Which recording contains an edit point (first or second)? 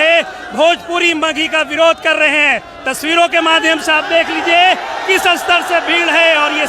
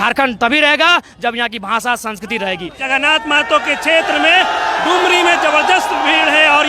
second